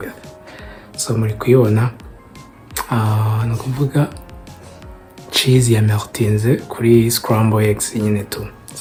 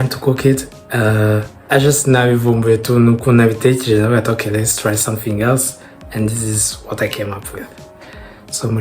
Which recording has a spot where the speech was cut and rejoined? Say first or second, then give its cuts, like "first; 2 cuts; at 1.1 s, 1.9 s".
second; 1 cut; at 1.5 s